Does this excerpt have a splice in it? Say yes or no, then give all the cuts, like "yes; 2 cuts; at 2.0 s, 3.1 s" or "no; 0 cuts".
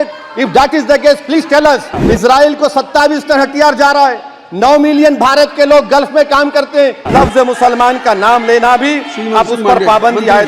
yes; 2 cuts; at 1.9 s, 7.1 s